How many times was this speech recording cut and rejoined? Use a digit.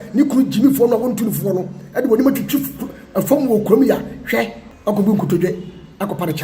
1